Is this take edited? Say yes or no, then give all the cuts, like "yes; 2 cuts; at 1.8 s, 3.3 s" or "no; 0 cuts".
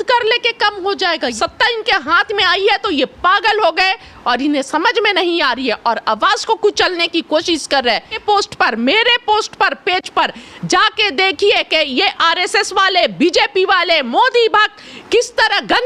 yes; 2 cuts; at 1.3 s, 8.1 s